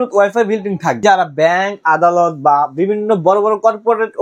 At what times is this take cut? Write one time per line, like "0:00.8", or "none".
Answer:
0:01.0

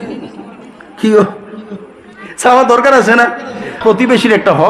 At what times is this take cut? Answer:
0:03.8

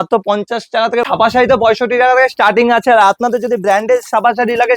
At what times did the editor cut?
0:01.1

